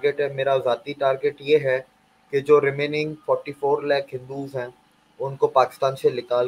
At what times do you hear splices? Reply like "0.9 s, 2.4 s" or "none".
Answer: none